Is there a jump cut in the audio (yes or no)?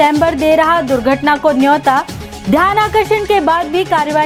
no